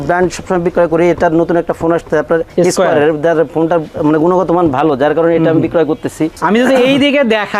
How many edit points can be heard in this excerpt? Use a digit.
1